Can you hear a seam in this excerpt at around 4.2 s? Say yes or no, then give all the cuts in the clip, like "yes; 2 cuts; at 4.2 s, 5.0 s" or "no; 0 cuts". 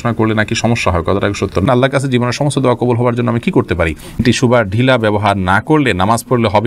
yes; 2 cuts; at 1.7 s, 4.2 s